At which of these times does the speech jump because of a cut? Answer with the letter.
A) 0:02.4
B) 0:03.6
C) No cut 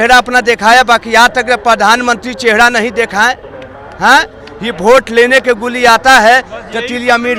C